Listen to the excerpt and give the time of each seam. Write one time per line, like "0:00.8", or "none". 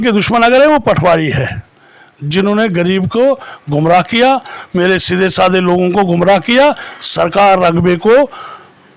none